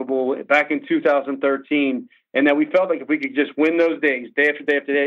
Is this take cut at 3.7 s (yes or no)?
no